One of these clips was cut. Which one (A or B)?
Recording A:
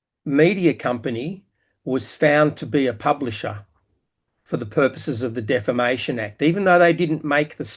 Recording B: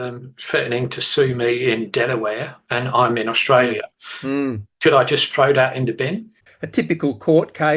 B